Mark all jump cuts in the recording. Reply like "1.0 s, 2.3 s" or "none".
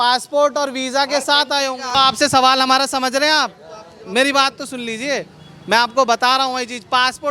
1.9 s

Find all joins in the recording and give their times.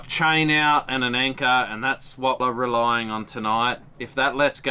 2.4 s

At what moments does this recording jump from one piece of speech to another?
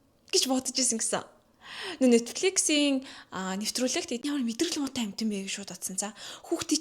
4.2 s

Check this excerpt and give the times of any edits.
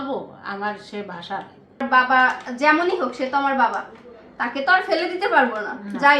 1.8 s

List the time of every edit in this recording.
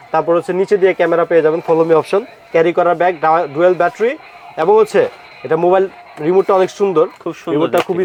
none

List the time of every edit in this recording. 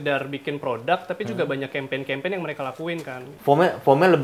3.3 s

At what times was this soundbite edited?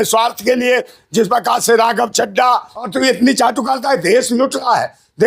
2.7 s

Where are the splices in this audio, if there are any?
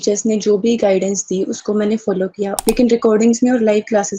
2.6 s

